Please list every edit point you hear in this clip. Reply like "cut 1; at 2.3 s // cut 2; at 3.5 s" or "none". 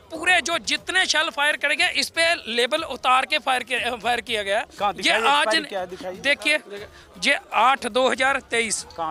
none

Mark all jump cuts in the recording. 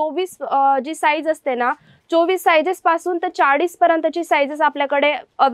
none

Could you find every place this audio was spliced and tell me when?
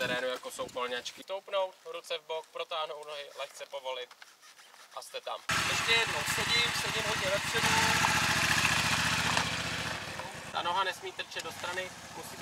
cut 1; at 1.2 s // cut 2; at 5.4 s // cut 3; at 10.4 s

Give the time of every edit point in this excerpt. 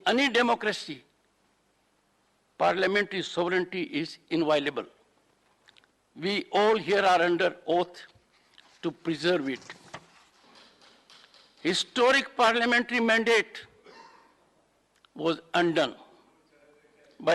cut 1; at 10.4 s

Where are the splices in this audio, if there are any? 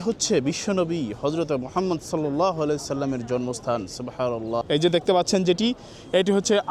cut 1; at 4.6 s

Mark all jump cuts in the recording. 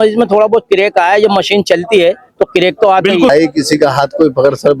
cut 1; at 3.3 s

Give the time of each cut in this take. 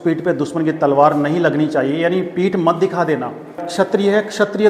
cut 1; at 3.7 s

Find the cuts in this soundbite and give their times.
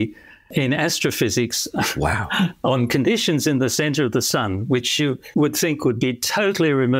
none

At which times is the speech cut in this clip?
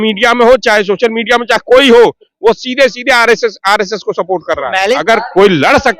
cut 1; at 4.9 s

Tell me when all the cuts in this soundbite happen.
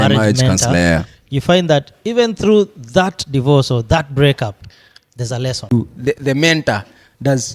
cut 1; at 5.6 s

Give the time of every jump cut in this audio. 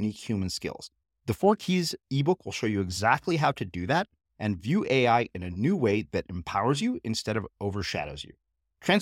none

